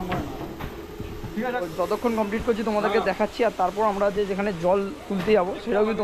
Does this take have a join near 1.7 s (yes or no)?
yes